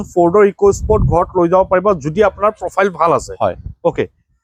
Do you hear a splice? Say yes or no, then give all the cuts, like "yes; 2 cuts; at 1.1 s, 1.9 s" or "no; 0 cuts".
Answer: no; 0 cuts